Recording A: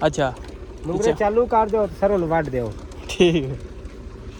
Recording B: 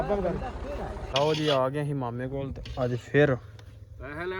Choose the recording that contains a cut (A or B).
B